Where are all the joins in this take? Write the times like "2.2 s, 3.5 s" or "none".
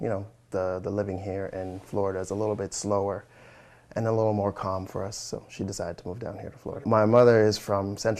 6.8 s